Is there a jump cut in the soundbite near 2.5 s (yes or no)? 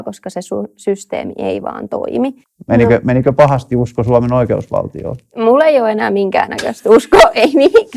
yes